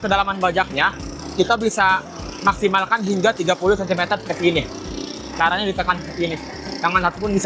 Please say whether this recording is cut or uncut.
uncut